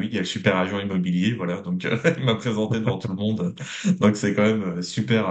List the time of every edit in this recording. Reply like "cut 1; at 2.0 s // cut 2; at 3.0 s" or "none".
none